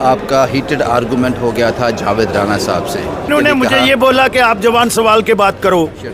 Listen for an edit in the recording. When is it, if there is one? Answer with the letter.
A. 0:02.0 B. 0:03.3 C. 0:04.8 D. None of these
B